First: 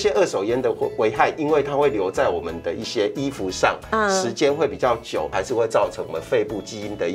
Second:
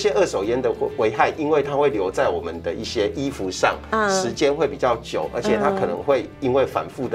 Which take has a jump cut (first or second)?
first